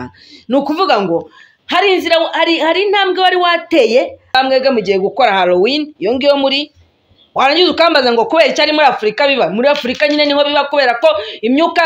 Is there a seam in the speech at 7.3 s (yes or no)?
no